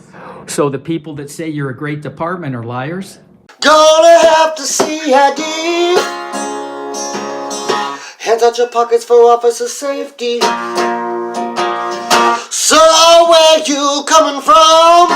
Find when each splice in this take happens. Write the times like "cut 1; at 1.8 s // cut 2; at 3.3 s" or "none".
cut 1; at 3.5 s